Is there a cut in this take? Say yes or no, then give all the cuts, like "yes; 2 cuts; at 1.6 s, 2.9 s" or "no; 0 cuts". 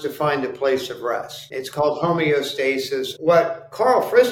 yes; 2 cuts; at 1.4 s, 3.1 s